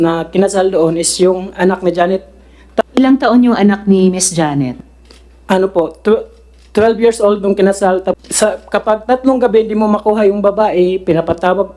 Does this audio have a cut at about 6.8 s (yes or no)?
no